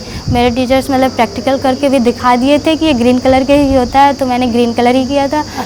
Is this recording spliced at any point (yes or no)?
no